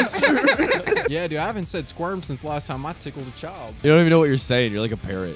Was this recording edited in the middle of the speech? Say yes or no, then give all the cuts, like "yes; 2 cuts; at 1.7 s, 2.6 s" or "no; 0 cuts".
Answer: yes; 2 cuts; at 1.1 s, 3.8 s